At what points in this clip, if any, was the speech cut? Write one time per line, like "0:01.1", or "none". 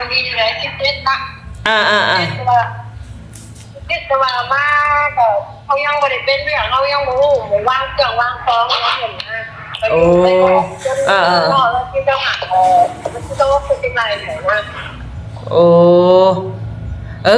none